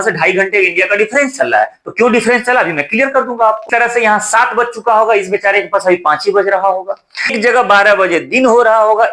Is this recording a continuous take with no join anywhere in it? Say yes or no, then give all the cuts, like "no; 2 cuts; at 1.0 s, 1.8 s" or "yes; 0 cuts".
no; 2 cuts; at 3.6 s, 7.3 s